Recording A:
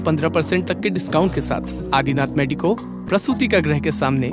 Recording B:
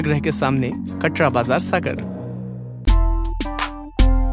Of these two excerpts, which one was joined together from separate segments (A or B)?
B